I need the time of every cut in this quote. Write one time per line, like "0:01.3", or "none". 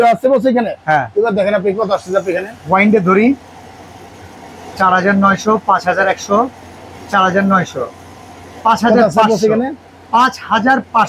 none